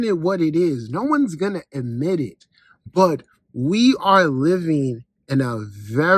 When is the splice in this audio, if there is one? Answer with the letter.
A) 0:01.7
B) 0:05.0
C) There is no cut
C